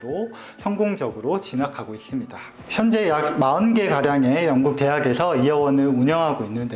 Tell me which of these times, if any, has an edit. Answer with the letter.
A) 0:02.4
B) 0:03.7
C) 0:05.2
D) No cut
A